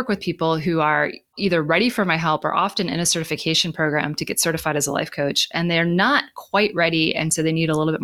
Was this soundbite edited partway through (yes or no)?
yes